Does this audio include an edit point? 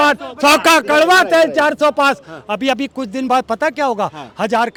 no; 0 cuts

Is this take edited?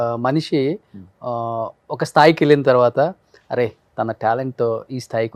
no; 0 cuts

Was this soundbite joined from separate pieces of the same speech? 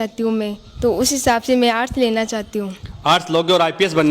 no; 0 cuts

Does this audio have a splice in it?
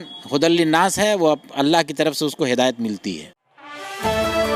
no; 0 cuts

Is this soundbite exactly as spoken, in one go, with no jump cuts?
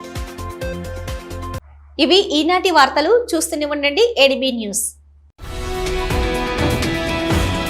yes; 0 cuts

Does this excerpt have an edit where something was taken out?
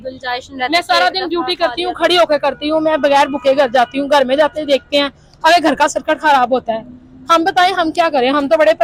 no; 0 cuts

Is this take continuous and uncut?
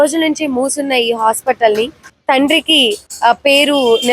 no; 2 cuts; at 2.0 s, 3.1 s

